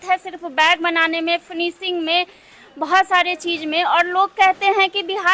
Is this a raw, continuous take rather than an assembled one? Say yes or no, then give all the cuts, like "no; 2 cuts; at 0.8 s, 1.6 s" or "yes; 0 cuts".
yes; 0 cuts